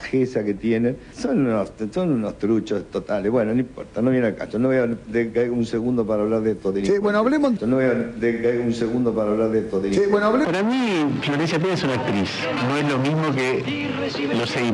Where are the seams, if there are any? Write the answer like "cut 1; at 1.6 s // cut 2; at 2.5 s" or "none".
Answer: cut 1; at 1.1 s // cut 2; at 10.5 s // cut 3; at 12.6 s